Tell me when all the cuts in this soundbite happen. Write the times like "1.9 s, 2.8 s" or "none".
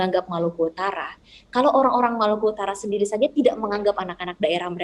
none